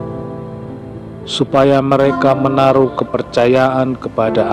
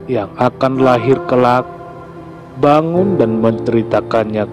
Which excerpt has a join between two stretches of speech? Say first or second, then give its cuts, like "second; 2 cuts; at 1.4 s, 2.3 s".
first; 1 cut; at 1.3 s